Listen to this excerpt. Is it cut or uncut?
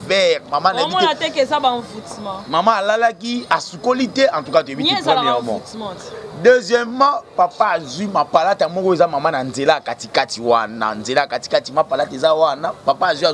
uncut